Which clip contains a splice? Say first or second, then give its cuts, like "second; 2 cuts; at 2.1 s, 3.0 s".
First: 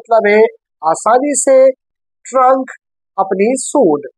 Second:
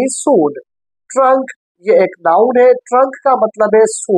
first; 1 cut; at 1.8 s